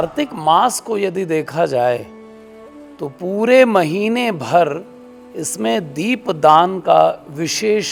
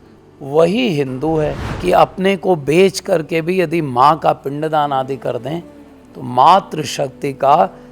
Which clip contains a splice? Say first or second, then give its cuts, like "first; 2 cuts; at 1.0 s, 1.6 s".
second; 1 cut; at 1.7 s